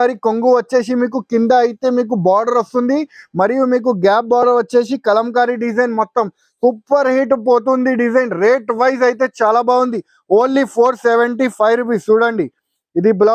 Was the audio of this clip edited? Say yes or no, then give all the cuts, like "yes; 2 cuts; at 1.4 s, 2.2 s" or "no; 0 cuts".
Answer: no; 0 cuts